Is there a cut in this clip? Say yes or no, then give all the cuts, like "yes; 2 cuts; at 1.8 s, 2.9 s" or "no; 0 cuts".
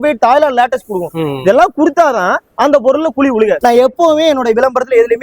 yes; 1 cut; at 3.6 s